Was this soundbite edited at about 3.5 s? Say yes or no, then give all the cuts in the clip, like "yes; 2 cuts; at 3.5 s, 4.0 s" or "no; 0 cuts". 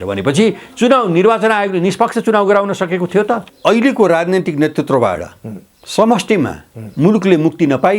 yes; 1 cut; at 3.5 s